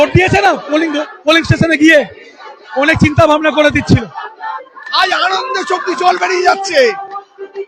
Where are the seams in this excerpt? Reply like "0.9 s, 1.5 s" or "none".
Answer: 4.3 s